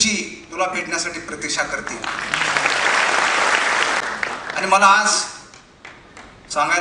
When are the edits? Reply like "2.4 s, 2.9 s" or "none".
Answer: 4.0 s